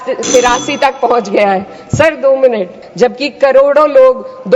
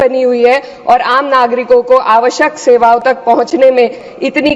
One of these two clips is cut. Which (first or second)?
first